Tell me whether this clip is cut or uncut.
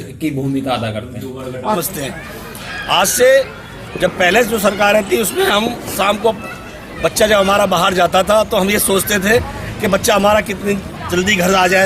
cut